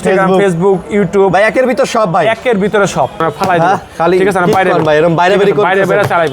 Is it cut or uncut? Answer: cut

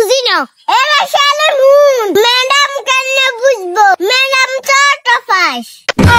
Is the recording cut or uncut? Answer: uncut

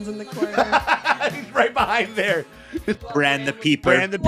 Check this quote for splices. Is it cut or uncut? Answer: cut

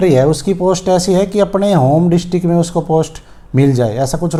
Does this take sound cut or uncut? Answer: uncut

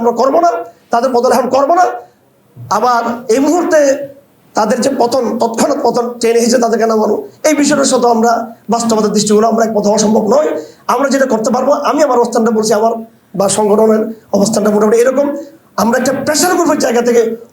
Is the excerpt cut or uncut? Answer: uncut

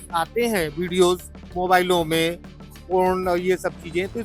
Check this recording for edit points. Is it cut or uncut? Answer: uncut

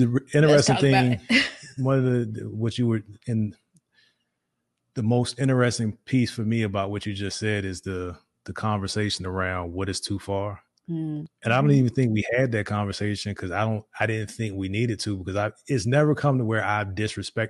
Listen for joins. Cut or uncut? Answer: uncut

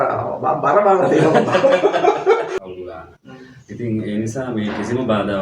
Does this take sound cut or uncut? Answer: cut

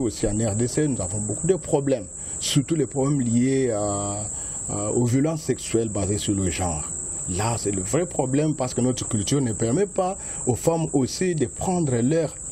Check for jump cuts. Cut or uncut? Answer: uncut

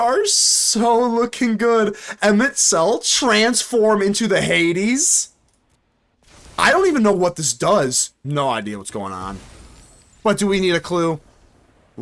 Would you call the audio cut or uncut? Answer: cut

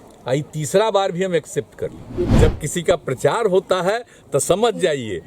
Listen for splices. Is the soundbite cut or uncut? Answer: cut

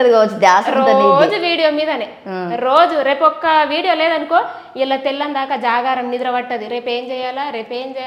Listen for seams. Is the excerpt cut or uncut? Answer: uncut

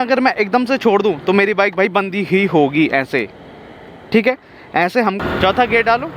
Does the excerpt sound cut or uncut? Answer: cut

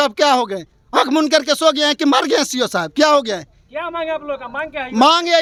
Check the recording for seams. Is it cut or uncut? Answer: uncut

